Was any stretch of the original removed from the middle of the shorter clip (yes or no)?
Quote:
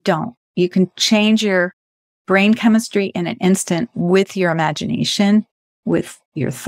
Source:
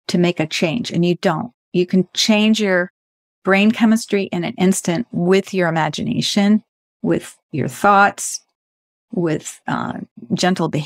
no